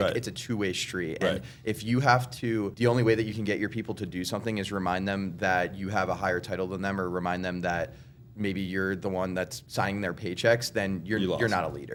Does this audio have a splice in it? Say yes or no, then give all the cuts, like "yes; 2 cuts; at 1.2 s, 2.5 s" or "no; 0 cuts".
no; 0 cuts